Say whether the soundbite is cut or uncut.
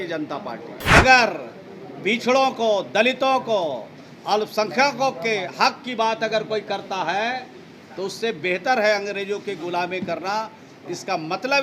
cut